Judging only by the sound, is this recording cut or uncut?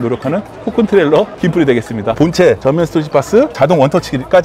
cut